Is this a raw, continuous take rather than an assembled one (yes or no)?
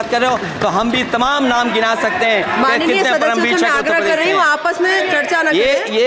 yes